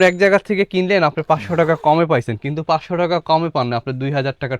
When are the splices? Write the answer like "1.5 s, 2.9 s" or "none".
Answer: none